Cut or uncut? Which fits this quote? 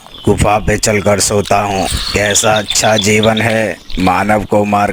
uncut